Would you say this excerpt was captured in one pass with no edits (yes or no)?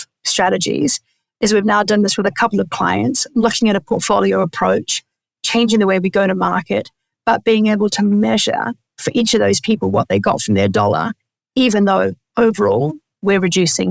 yes